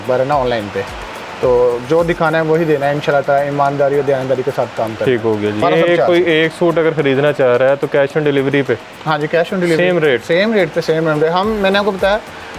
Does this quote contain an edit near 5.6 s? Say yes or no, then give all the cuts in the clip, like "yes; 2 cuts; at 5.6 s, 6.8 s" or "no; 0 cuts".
yes; 1 cut; at 5.6 s